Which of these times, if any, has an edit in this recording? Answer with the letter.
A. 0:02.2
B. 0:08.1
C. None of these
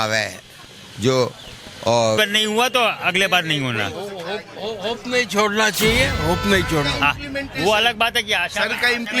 A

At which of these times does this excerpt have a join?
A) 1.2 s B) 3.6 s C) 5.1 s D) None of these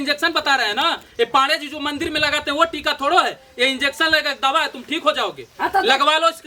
D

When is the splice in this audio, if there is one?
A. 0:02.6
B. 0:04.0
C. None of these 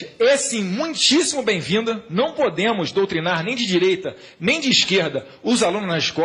A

